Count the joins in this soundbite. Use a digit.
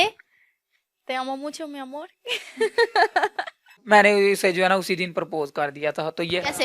1